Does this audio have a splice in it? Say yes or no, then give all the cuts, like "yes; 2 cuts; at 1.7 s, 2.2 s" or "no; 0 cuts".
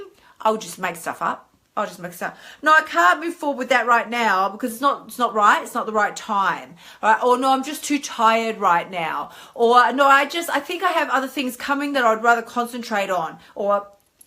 no; 0 cuts